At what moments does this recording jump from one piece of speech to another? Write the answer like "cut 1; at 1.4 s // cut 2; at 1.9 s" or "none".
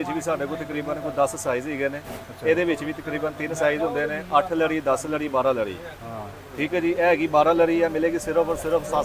none